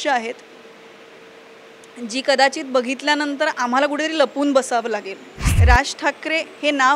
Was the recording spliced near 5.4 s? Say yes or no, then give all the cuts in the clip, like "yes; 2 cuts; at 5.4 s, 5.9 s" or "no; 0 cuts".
yes; 1 cut; at 5.4 s